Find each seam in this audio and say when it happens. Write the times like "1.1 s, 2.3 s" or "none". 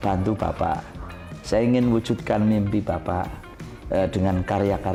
none